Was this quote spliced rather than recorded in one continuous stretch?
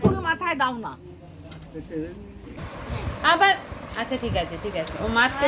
yes; 1 cut; at 2.6 s

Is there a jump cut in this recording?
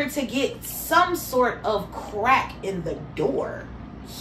no; 0 cuts

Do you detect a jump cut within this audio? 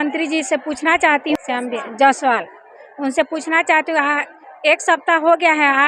yes; 1 cut; at 1.4 s

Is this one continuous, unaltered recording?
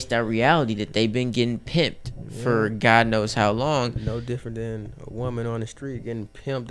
yes; 0 cuts

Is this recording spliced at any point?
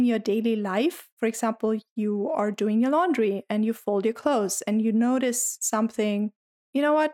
yes; 1 cut; at 1.1 s

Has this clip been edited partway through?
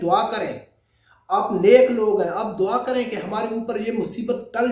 no; 0 cuts

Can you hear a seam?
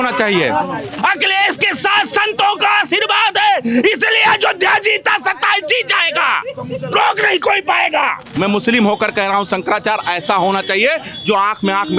yes; 2 cuts; at 0.9 s, 8.2 s

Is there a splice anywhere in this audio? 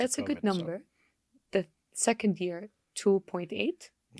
no; 0 cuts

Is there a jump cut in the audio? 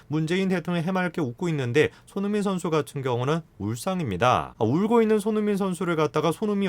yes; 1 cut; at 4.5 s

